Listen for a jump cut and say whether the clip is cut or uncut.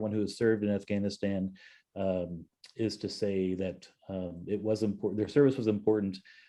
uncut